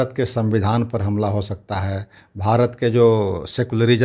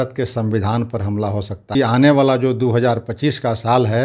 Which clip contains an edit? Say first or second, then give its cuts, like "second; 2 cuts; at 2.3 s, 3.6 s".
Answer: second; 1 cut; at 1.7 s